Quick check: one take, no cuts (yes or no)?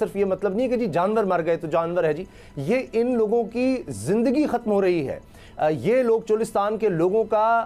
yes